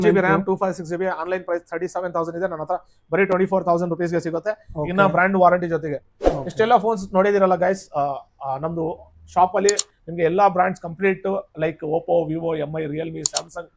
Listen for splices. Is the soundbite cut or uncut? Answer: uncut